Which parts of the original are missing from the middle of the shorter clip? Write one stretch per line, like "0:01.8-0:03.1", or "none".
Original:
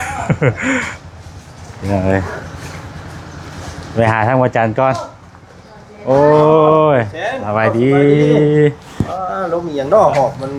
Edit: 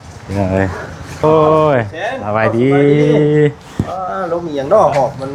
0:02.8-0:06.4